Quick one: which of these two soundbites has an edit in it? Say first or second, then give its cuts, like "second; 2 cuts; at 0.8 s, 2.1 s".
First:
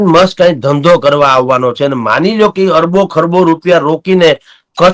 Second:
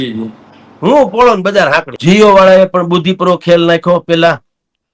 second; 1 cut; at 1.9 s